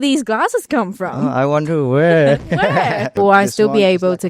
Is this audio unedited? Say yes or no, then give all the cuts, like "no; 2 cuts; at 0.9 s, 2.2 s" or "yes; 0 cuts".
no; 1 cut; at 3.1 s